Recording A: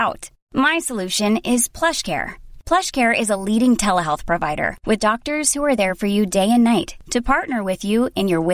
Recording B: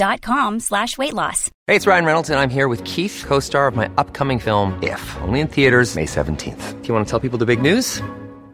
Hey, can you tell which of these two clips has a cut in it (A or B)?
B